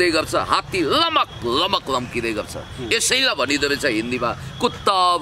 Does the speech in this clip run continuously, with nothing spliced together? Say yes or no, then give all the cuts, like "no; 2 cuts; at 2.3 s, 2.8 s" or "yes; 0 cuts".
yes; 0 cuts